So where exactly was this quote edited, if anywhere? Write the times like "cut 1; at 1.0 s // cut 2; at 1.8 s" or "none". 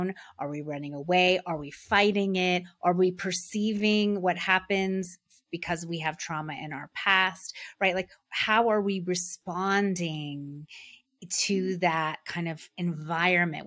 none